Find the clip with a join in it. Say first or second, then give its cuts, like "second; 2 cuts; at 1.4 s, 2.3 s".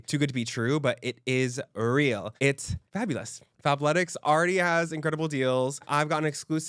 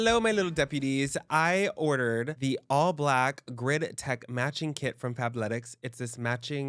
first; 2 cuts; at 3.5 s, 5.8 s